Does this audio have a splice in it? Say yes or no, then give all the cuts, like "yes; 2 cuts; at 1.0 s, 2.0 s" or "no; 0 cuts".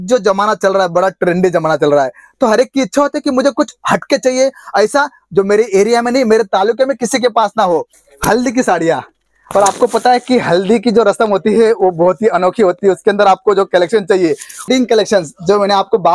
yes; 2 cuts; at 8.0 s, 14.7 s